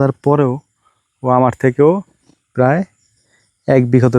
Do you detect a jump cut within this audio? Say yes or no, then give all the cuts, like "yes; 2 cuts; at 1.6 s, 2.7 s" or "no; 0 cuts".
no; 0 cuts